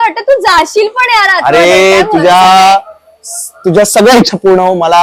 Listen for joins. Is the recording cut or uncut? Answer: uncut